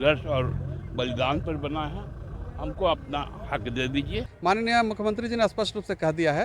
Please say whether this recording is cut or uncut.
cut